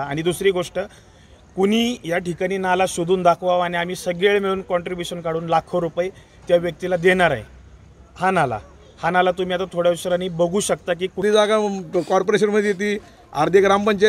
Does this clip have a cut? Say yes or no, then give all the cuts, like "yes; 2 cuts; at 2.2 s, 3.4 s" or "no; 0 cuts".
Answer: yes; 1 cut; at 11.2 s